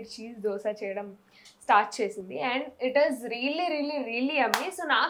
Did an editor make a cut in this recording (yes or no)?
no